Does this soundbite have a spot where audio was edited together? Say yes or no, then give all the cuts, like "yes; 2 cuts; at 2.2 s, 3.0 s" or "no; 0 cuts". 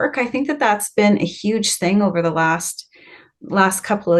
no; 0 cuts